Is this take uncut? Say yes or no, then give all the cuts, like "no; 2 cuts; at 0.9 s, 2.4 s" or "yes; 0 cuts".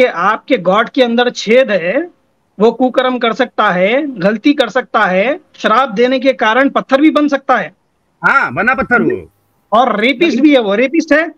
yes; 0 cuts